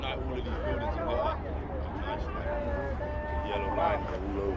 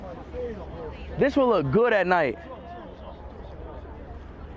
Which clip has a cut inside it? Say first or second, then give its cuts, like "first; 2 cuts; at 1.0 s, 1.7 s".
second; 1 cut; at 1.2 s